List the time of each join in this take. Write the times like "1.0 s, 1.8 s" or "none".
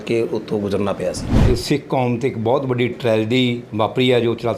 1.3 s